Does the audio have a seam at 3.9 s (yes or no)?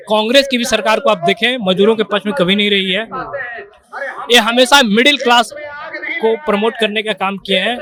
no